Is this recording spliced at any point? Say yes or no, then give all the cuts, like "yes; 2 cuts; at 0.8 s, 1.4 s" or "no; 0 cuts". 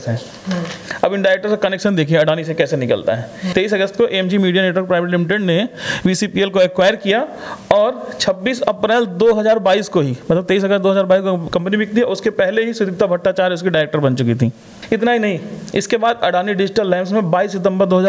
yes; 2 cuts; at 3.5 s, 14.7 s